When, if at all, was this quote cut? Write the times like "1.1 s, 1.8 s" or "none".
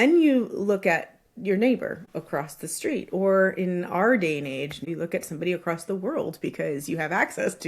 2.0 s, 4.8 s